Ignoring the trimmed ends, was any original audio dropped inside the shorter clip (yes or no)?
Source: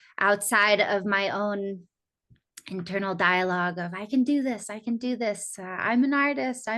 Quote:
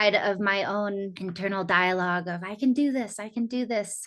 yes